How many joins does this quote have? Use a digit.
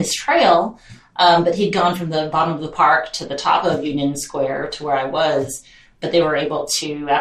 1